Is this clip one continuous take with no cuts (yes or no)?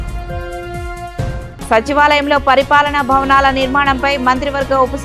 yes